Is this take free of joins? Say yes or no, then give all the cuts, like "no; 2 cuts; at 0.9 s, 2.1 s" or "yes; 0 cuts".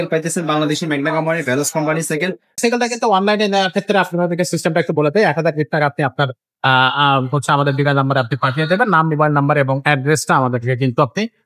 no; 1 cut; at 2.6 s